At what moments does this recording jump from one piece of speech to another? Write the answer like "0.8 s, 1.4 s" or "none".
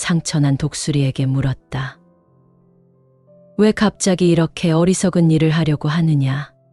none